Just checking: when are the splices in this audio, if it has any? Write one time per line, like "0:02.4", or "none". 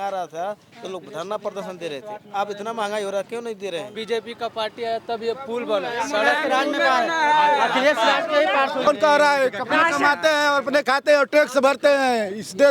0:03.9
0:08.9